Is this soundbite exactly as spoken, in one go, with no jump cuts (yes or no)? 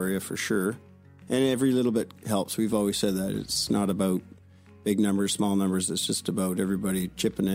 no